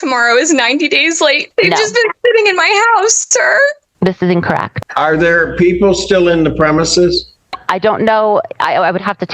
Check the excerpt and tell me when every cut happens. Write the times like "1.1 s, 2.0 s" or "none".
1.4 s, 4.7 s